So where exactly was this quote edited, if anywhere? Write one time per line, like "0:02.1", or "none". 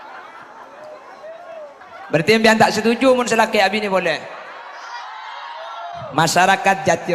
0:01.8